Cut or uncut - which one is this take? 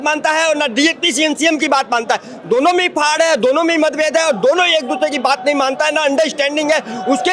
uncut